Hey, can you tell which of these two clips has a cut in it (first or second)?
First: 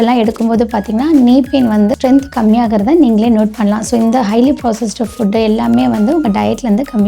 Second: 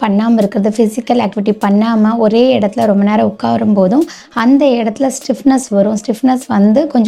first